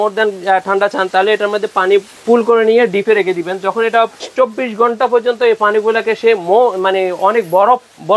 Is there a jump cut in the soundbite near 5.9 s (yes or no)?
no